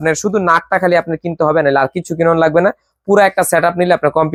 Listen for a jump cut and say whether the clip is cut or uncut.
uncut